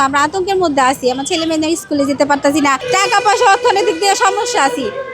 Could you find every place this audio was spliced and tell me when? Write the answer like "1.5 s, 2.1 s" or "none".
2.8 s